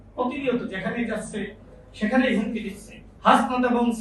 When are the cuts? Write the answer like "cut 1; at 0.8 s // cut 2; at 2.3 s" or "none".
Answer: cut 1; at 3.1 s